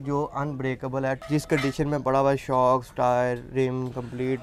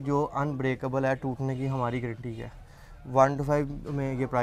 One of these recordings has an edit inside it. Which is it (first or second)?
first